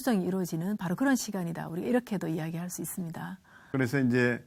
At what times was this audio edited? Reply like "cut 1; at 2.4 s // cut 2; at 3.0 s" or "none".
none